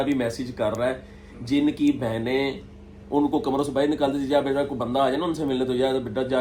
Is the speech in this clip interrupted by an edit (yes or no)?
no